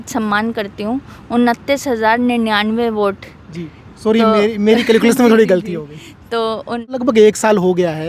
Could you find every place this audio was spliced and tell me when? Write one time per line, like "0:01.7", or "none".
0:07.0